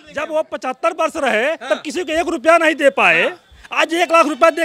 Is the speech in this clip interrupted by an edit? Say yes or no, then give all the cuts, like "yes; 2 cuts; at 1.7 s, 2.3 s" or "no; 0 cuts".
no; 0 cuts